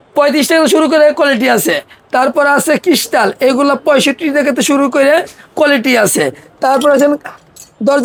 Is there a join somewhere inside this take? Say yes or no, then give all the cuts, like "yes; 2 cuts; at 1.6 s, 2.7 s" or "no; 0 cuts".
no; 0 cuts